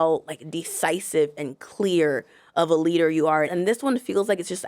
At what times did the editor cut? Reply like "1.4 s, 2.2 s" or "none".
3.5 s